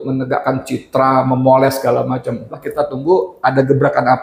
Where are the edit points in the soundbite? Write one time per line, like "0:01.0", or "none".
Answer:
0:02.6